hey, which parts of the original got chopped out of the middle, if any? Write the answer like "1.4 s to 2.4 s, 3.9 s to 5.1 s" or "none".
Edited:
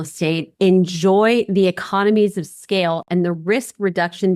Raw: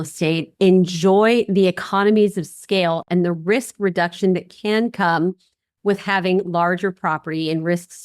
none